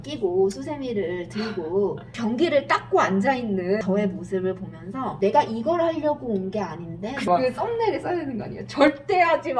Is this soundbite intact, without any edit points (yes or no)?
no